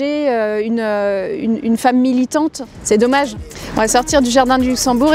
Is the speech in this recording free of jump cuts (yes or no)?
yes